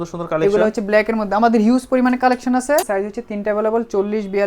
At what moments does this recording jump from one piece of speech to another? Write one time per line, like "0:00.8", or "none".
0:02.9